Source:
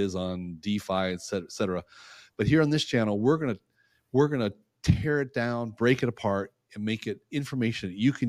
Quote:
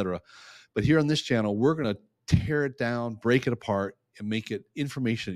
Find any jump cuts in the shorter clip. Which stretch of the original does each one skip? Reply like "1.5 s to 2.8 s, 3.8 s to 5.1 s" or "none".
3.5 s to 4.4 s